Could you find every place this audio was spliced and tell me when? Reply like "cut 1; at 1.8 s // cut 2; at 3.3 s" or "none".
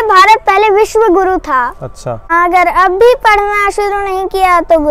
cut 1; at 2.2 s